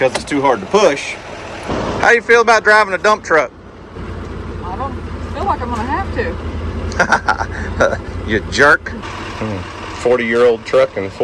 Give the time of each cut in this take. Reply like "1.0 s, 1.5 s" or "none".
1.7 s, 3.9 s, 8.9 s